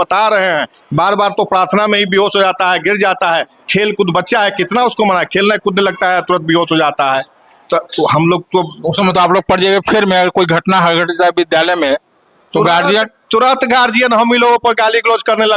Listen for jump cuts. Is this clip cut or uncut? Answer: uncut